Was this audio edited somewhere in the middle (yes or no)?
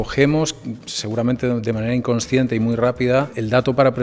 no